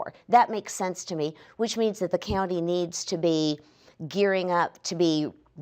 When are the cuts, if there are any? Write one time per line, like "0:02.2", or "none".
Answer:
0:02.7